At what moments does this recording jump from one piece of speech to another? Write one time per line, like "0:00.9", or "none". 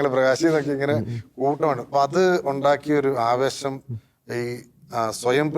0:01.8